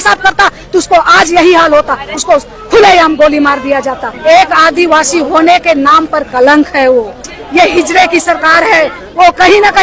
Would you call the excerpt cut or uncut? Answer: cut